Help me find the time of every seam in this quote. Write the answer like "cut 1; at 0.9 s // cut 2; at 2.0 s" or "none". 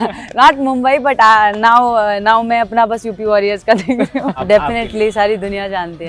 cut 1; at 4.4 s